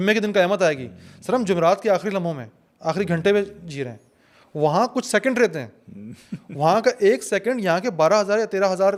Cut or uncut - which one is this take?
uncut